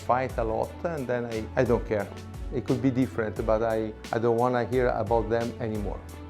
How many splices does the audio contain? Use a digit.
1